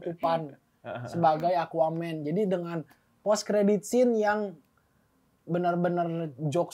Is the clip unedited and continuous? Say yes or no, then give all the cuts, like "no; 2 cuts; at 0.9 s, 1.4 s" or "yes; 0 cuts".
yes; 0 cuts